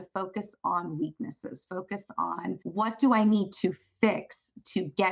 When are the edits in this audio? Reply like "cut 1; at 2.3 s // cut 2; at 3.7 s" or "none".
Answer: cut 1; at 2.6 s